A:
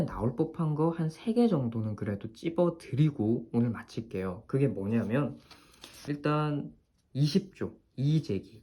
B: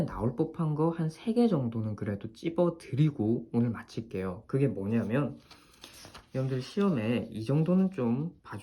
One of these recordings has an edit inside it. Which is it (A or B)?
A